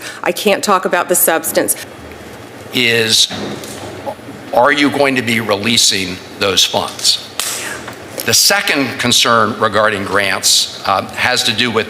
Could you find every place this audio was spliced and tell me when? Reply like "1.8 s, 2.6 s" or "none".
1.8 s